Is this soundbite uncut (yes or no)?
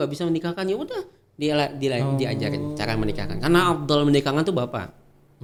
yes